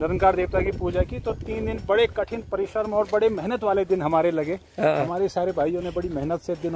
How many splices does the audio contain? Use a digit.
0